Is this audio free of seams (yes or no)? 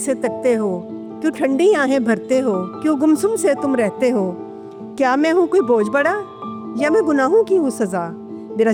yes